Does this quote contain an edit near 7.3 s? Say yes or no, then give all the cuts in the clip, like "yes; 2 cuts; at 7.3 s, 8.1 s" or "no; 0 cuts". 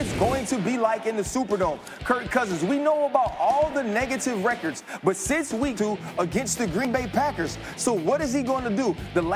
no; 1 cut; at 5.7 s